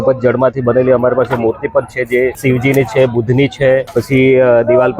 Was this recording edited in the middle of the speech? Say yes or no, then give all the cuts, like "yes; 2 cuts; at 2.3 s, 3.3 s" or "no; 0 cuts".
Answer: yes; 2 cuts; at 2.4 s, 3.9 s